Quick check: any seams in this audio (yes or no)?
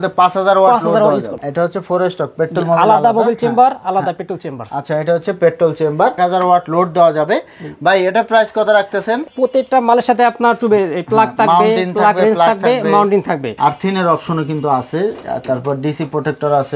yes